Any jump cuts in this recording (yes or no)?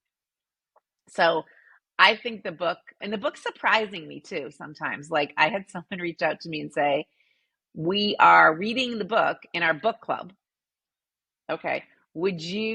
no